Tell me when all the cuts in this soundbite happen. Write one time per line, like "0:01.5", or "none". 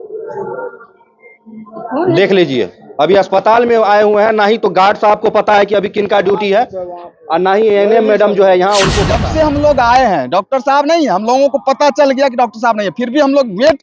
0:09.0